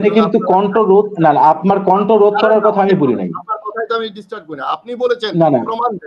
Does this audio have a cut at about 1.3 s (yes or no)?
no